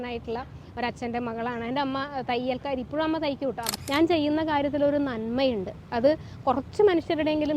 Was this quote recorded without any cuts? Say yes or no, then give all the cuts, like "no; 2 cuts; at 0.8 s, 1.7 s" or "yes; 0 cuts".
no; 1 cut; at 3.8 s